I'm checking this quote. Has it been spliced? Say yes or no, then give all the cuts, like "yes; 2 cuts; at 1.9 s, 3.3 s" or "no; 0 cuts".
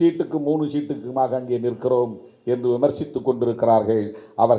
no; 0 cuts